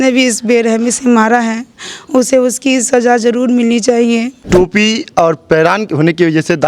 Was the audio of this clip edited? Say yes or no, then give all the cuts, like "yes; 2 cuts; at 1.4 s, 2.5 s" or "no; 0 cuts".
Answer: yes; 1 cut; at 4.4 s